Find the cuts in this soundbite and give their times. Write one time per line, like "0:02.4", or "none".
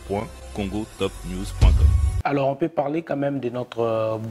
0:02.1